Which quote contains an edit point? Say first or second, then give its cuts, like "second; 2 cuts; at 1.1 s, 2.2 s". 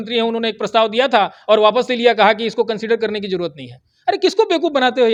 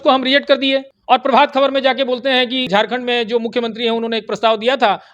second; 2 cuts; at 0.9 s, 2.7 s